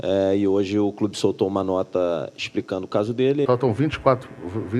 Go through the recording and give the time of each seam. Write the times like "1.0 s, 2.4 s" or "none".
3.5 s